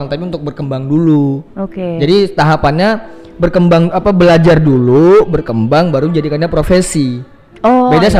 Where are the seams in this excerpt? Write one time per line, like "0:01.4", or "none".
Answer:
none